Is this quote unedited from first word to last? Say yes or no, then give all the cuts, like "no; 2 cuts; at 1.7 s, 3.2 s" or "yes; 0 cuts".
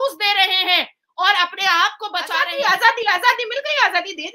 no; 1 cut; at 2.3 s